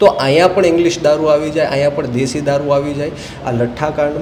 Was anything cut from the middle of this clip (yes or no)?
no